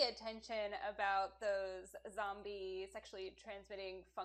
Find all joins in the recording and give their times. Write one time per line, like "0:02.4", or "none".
none

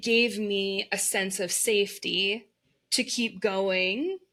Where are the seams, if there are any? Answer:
none

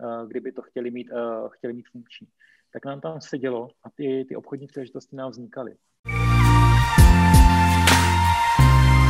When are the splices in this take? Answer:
0:06.1

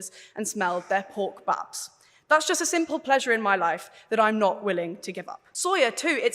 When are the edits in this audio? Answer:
0:05.4

